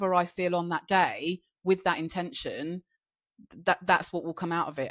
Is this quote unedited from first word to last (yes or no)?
yes